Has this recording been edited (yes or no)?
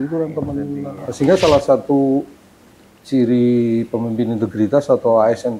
yes